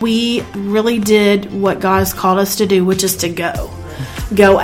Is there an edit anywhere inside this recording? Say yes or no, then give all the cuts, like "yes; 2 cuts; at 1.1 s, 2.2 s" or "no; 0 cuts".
no; 0 cuts